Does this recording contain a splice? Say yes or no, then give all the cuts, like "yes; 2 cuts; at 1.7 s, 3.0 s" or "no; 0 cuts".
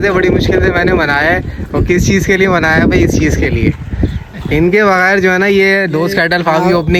no; 0 cuts